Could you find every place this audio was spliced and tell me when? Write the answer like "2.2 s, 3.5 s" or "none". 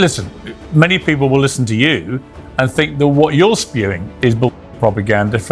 none